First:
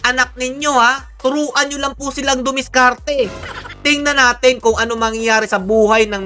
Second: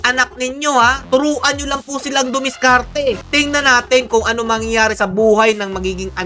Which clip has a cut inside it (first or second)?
second